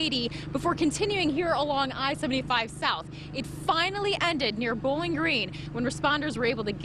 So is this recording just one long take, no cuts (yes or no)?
yes